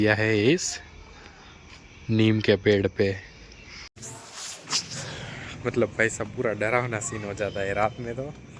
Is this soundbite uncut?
no; 1 cut; at 4.0 s

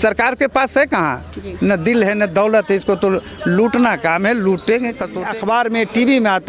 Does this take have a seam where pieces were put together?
yes; 1 cut; at 5.1 s

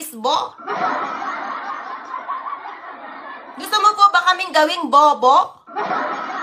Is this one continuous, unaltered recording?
yes; 0 cuts

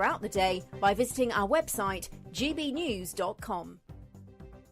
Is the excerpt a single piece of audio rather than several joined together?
no; 1 cut; at 3.8 s

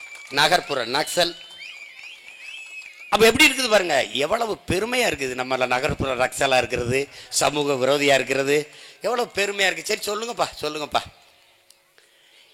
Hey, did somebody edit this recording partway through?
no; 0 cuts

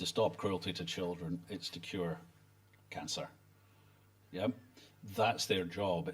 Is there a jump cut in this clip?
no; 0 cuts

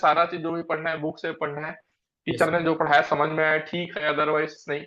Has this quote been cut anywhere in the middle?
no; 0 cuts

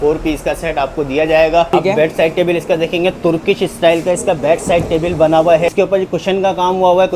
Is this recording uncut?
no; 2 cuts; at 1.7 s, 5.7 s

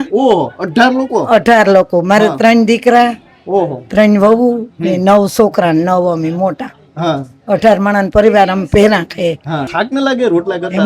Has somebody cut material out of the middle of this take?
yes; 1 cut; at 9.7 s

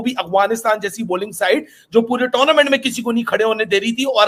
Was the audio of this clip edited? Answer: no; 0 cuts

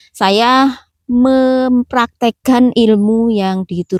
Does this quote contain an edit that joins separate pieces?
no; 0 cuts

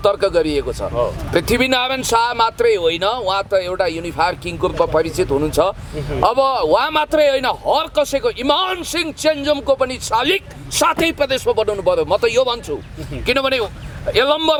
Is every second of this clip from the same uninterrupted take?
yes; 0 cuts

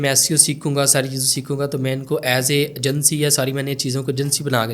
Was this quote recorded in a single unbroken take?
yes; 0 cuts

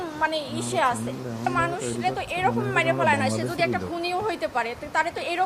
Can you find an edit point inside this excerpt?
yes; 1 cut; at 1.4 s

